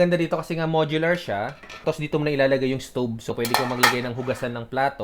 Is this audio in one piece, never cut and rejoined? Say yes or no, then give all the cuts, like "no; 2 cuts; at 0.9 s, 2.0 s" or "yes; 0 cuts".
no; 2 cuts; at 1.8 s, 3.3 s